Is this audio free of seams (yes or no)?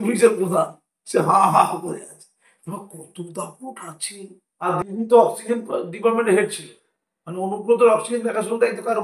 no